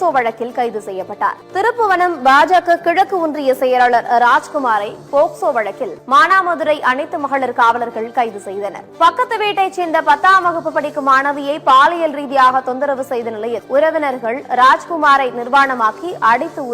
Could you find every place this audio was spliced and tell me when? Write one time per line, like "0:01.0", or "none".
0:01.4
0:05.9
0:08.8
0:13.6